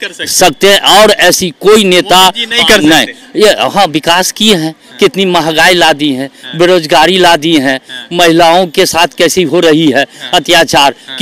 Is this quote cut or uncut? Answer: uncut